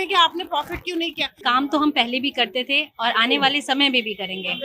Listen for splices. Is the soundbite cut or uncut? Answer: cut